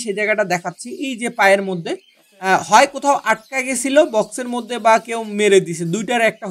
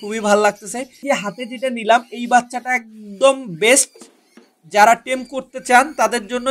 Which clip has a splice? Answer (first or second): second